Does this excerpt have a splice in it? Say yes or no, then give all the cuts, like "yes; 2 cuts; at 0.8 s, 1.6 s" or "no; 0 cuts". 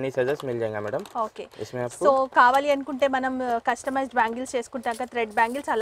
no; 0 cuts